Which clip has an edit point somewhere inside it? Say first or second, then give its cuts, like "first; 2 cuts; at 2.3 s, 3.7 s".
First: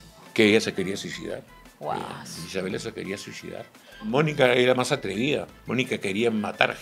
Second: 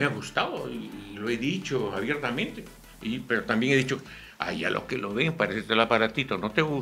first; 2 cuts; at 4.1 s, 5.6 s